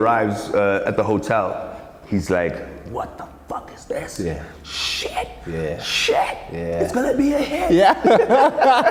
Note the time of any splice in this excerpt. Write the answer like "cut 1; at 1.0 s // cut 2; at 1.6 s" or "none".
none